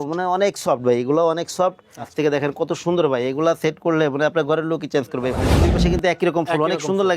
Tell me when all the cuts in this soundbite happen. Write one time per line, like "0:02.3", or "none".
0:02.1
0:05.5